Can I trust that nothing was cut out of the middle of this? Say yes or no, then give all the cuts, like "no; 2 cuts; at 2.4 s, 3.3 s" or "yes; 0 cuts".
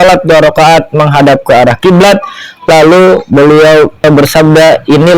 no; 1 cut; at 4.0 s